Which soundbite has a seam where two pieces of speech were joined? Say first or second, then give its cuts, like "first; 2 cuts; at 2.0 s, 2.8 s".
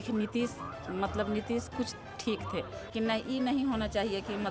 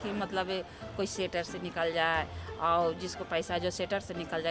first; 1 cut; at 2.8 s